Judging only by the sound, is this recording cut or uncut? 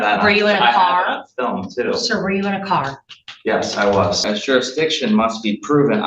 cut